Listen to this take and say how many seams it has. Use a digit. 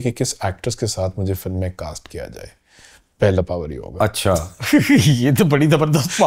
0